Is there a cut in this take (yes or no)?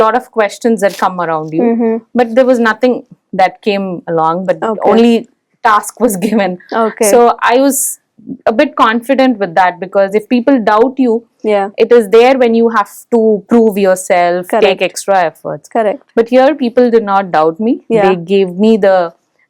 no